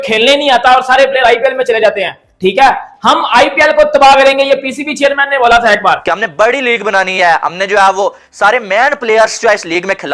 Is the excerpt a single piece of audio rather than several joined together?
no; 1 cut; at 6.0 s

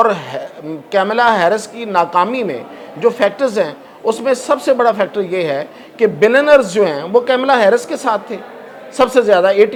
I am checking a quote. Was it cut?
no; 0 cuts

